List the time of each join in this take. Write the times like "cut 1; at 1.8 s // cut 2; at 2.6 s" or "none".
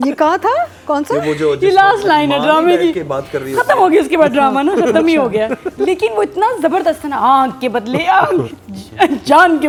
none